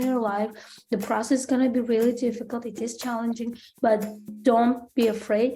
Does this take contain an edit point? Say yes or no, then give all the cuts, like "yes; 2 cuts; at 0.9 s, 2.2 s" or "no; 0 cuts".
no; 0 cuts